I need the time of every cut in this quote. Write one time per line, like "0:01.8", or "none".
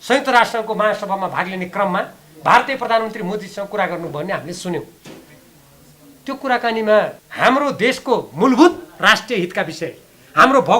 0:07.2